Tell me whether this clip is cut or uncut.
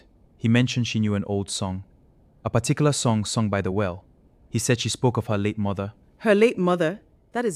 uncut